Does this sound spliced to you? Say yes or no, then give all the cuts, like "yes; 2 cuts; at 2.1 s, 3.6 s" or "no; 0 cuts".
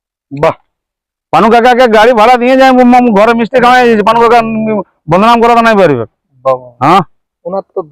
yes; 1 cut; at 6.7 s